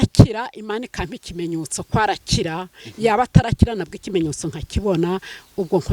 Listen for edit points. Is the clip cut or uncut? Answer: uncut